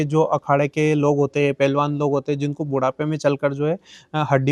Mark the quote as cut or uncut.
uncut